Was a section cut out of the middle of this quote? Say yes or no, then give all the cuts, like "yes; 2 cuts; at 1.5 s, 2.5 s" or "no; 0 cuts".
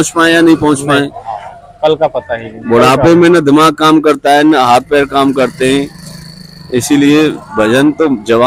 no; 0 cuts